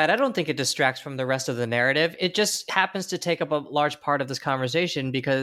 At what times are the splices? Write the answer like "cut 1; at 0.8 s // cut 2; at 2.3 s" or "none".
cut 1; at 2.6 s